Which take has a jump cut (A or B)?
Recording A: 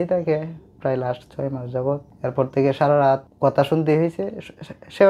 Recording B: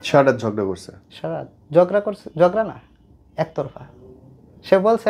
A